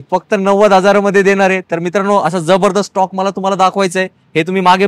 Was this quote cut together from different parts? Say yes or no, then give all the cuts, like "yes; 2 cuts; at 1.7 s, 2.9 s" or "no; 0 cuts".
no; 0 cuts